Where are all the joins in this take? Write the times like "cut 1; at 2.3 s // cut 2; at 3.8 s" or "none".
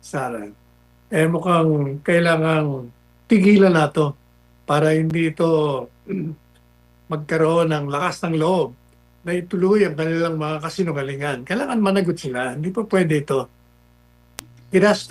none